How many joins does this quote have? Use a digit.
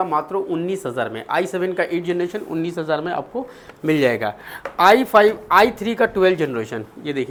0